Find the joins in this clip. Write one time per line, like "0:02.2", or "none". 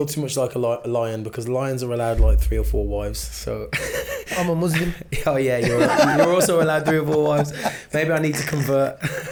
none